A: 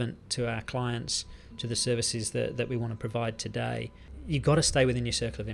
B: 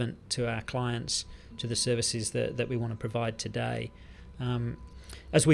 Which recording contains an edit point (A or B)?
A